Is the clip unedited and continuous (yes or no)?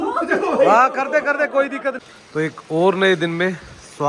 no